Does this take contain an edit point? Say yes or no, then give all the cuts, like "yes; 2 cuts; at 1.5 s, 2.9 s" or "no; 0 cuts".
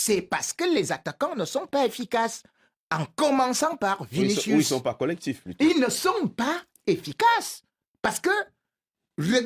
no; 0 cuts